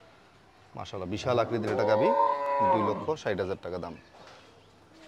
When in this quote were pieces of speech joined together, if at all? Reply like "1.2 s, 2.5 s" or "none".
none